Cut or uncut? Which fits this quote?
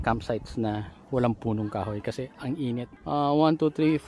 cut